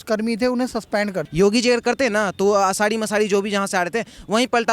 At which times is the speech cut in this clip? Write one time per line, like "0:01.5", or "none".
0:01.2